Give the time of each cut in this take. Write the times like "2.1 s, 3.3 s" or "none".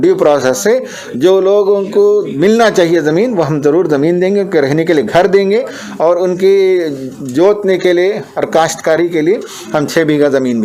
none